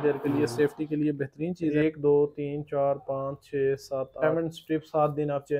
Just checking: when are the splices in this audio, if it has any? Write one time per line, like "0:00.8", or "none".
0:01.7
0:04.2